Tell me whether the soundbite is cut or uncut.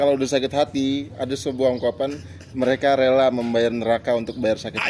uncut